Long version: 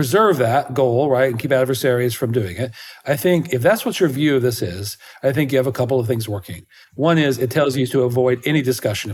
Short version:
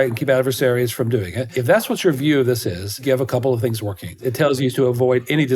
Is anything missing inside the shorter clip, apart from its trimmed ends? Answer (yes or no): yes